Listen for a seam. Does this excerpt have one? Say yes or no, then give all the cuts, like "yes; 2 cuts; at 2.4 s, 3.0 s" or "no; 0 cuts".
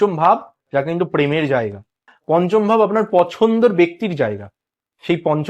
yes; 1 cut; at 2.1 s